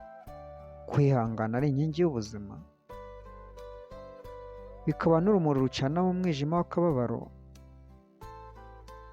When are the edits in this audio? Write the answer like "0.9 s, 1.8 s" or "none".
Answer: 7.3 s